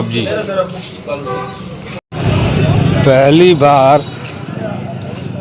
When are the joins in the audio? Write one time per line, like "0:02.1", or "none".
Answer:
0:02.1